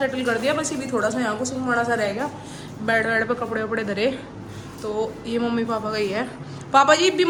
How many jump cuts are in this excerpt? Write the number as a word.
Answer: zero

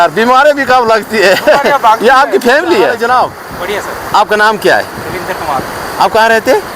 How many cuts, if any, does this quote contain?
one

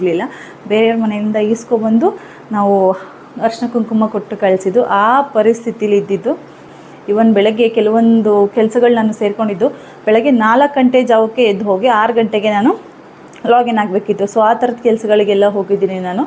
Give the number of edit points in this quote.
one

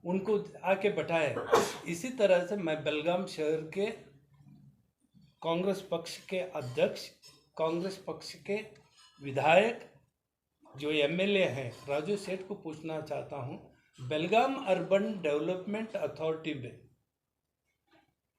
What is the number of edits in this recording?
zero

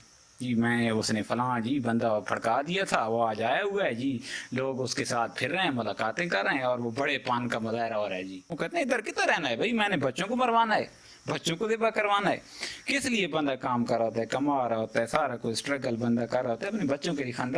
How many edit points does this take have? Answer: one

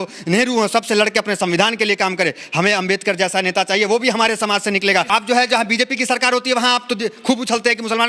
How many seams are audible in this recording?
one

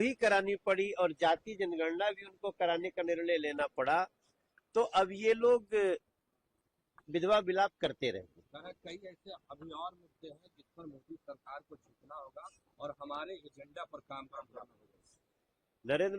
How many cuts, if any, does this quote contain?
zero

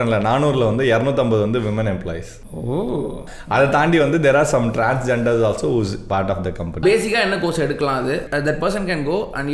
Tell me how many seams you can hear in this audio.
three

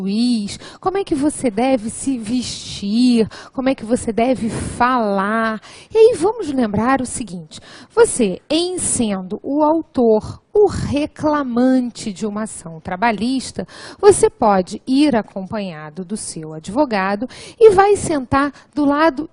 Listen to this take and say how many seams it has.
one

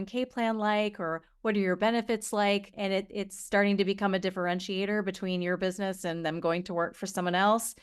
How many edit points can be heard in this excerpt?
one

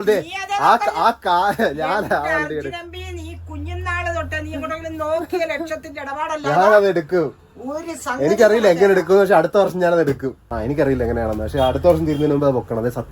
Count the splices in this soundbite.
one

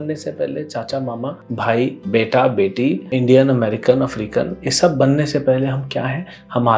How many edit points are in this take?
two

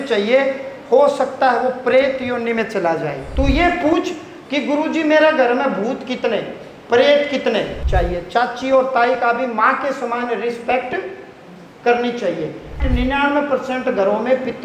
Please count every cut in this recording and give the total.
three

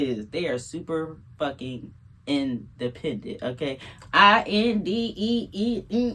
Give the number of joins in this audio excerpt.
zero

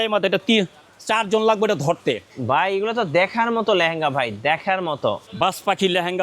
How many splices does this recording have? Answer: two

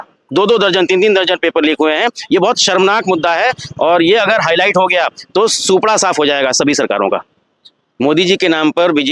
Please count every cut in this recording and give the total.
one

